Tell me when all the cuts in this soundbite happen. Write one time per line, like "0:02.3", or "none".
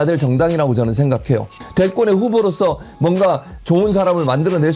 0:01.5

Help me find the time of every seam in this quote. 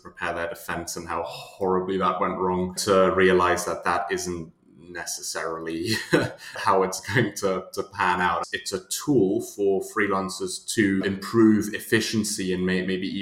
0:02.8
0:06.6
0:08.5
0:11.0

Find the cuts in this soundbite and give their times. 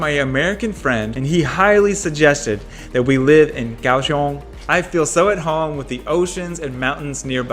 0:01.1
0:04.5

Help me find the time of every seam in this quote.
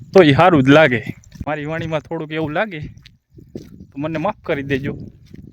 0:01.4

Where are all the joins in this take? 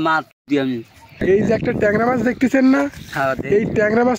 0:01.1

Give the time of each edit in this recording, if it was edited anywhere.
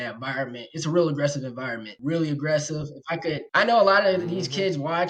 none

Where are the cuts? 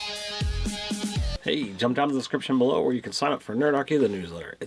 0:01.3

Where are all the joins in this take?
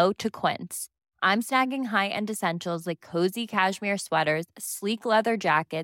none

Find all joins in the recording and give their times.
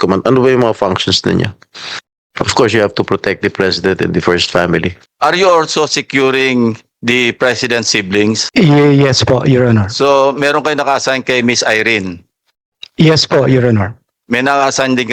0:05.0
0:08.4

